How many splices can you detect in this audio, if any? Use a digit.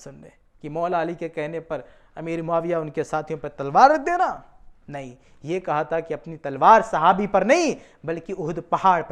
0